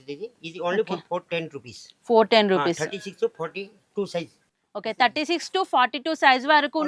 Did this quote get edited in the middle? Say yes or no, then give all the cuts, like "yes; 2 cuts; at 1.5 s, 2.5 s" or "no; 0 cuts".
no; 0 cuts